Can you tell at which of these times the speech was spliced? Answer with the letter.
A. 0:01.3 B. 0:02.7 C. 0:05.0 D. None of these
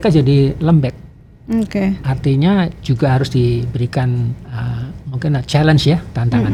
D